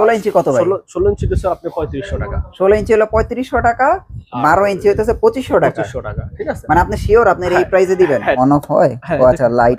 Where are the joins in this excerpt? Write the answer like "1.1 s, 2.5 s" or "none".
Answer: 8.4 s

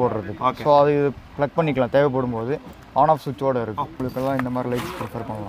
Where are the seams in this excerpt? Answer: 4.0 s

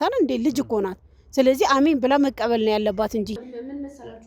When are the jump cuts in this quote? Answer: 3.3 s

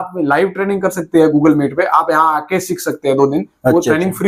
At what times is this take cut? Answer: none

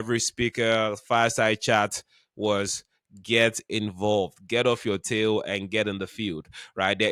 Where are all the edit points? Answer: none

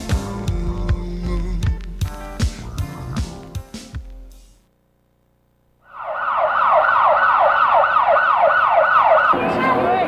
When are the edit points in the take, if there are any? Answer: 7.9 s

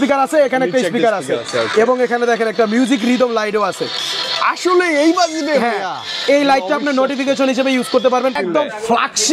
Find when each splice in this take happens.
8.4 s

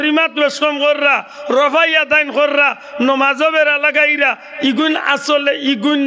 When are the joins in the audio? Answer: none

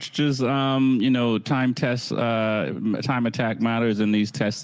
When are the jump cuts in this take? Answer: none

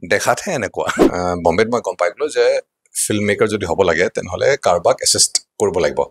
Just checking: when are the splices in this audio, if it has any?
1.0 s

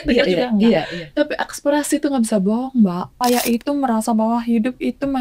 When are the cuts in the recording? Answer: 3.2 s

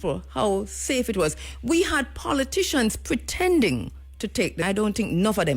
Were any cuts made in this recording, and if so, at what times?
4.6 s

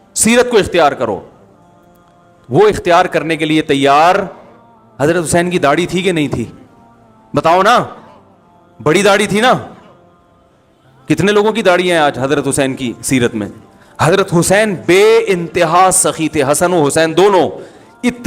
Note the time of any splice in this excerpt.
none

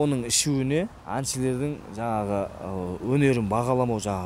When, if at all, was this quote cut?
1.0 s

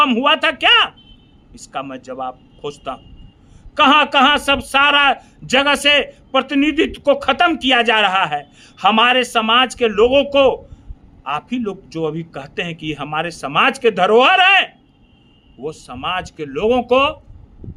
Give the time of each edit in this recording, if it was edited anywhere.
none

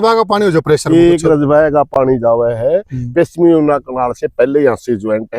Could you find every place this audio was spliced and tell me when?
none

